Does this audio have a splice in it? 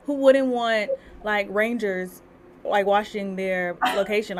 no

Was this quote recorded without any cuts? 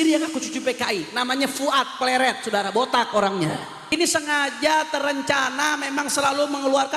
no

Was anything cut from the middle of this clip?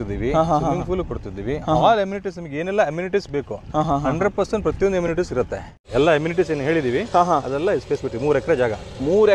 yes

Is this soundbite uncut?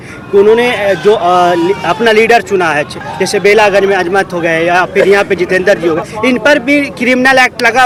yes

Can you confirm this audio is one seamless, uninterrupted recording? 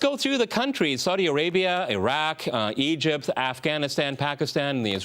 no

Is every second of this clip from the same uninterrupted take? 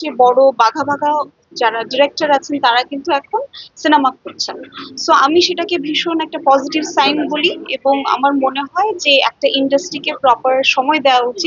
yes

